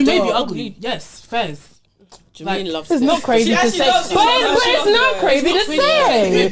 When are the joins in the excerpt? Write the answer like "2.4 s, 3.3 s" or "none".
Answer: none